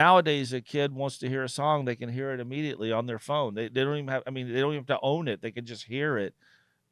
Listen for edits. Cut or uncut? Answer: uncut